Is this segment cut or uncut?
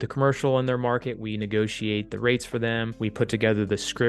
cut